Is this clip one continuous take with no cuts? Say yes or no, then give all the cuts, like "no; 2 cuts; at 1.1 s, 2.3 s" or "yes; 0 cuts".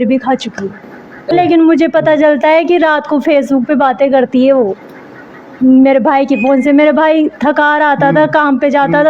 no; 1 cut; at 1.3 s